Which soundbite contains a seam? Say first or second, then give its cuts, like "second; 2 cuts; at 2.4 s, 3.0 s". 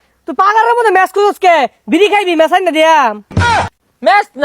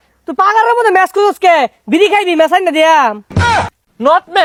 first; 1 cut; at 3.5 s